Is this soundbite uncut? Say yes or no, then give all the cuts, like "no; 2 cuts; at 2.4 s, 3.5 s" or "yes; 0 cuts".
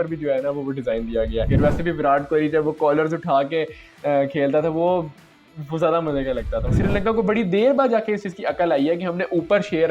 no; 2 cuts; at 1.5 s, 6.7 s